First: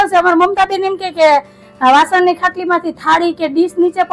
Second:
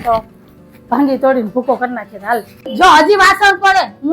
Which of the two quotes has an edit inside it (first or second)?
second